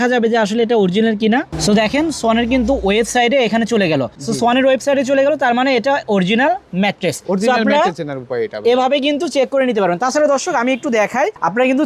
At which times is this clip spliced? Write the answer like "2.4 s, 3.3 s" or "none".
none